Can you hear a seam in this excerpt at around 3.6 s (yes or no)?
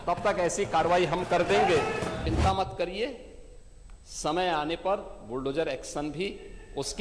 no